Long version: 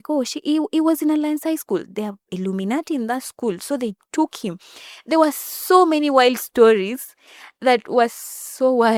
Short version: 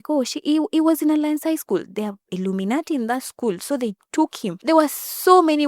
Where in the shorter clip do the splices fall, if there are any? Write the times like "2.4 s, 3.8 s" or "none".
4.5 s